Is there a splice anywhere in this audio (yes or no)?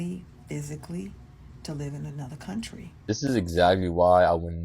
yes